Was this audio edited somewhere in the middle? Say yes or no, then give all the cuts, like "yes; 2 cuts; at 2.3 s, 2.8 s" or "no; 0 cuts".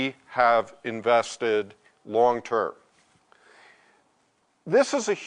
no; 0 cuts